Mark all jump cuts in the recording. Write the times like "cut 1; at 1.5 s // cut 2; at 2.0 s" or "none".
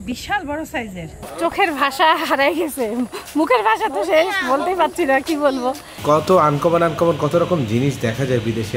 cut 1; at 1.3 s // cut 2; at 5.9 s